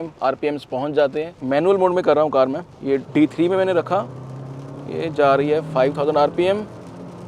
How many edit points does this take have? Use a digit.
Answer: 1